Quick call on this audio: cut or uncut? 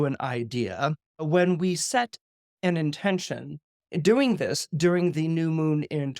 cut